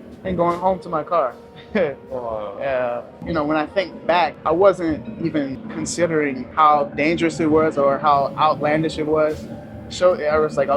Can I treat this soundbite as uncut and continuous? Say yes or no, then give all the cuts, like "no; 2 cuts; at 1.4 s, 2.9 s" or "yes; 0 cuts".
no; 4 cuts; at 3.2 s, 4.4 s, 5.6 s, 6.5 s